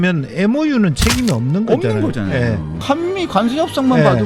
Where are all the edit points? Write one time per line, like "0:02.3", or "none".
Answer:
0:02.8